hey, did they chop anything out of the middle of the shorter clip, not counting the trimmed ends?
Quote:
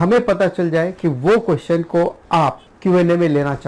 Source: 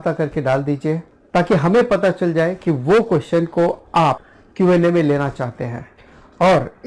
yes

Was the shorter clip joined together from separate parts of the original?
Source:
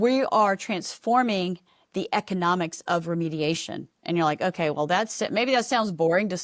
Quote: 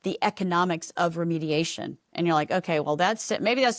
no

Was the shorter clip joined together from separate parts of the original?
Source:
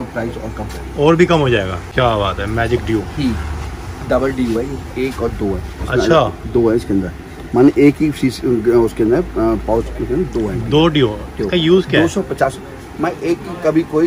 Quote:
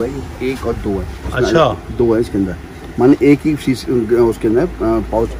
no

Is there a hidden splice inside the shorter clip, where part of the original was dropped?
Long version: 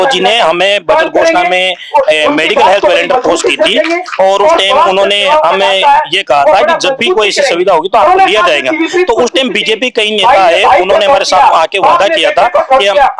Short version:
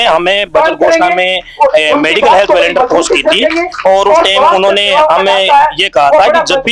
no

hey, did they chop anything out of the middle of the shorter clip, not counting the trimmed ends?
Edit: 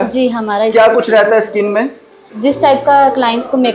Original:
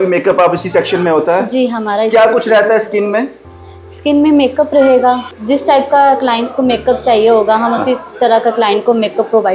yes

